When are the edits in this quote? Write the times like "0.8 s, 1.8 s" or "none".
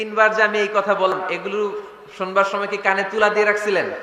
1.1 s